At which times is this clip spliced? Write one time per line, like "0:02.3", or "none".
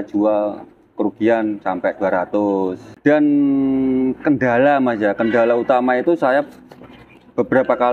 0:02.8